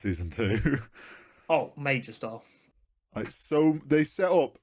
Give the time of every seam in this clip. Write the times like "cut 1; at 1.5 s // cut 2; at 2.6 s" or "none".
none